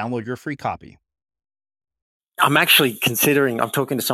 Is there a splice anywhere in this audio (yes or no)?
yes